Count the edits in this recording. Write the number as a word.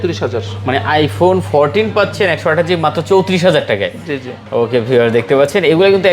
zero